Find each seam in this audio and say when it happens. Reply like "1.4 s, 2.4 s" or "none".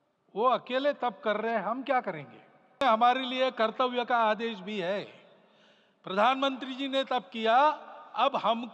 2.8 s

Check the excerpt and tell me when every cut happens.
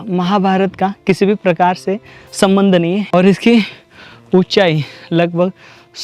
3.1 s

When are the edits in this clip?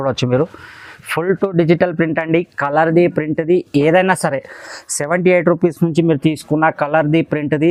none

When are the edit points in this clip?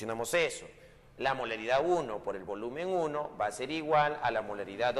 3.8 s

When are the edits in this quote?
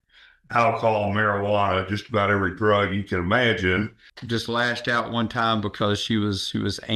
4.0 s

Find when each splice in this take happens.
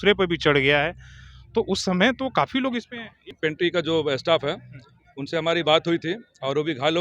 3.4 s

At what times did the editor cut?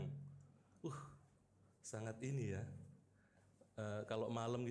none

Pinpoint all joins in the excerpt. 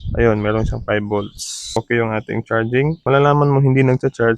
1.8 s, 3.0 s

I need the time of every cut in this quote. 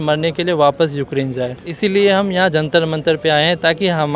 1.6 s

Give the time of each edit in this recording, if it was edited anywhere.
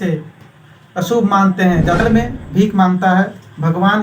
2.0 s

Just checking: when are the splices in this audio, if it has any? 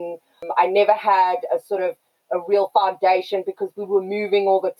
none

